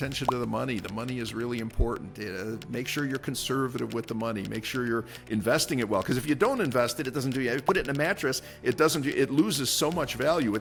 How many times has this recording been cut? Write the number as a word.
zero